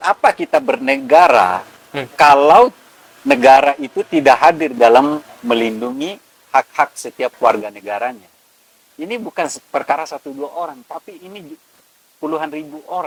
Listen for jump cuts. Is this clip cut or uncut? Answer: uncut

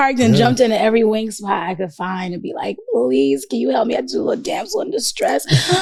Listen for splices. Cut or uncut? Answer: uncut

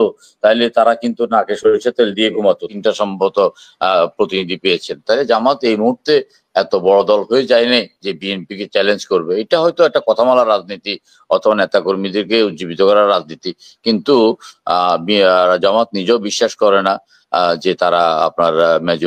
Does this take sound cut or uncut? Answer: cut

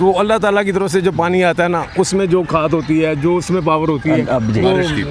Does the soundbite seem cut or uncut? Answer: uncut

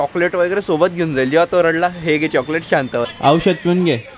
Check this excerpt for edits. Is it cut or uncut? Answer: cut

